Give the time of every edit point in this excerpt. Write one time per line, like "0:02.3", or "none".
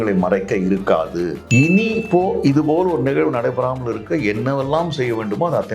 0:01.4